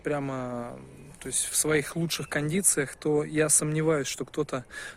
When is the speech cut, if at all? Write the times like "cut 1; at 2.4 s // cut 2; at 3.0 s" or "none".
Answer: none